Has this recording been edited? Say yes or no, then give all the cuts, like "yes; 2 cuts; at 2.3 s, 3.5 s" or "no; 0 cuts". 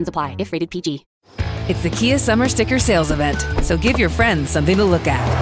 no; 0 cuts